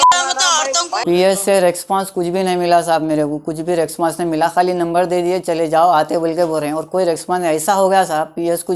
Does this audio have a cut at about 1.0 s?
yes; 1 cut; at 1.0 s

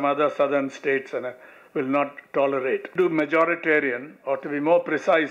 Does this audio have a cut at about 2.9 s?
yes; 1 cut; at 2.9 s

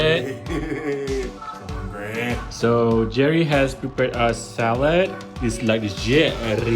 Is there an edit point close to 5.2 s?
yes; 1 cut; at 5.2 s

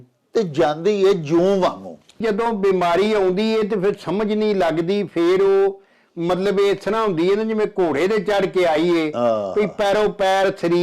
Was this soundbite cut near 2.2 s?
yes; 1 cut; at 2.2 s

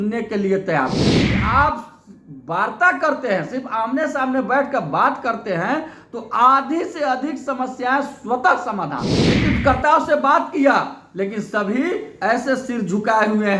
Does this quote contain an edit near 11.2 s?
no; 2 cuts; at 1.3 s, 9.4 s

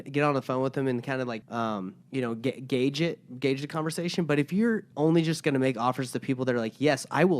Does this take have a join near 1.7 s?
yes; 2 cuts; at 1.7 s, 4.9 s

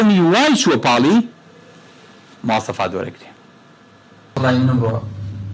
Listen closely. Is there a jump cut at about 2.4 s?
no; 1 cut; at 4.4 s

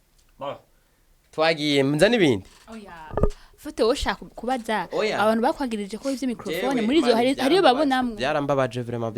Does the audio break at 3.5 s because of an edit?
no; 0 cuts

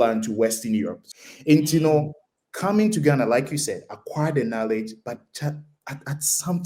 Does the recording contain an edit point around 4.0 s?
no; 1 cut; at 1.0 s

